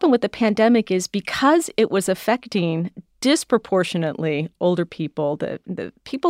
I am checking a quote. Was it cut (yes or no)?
no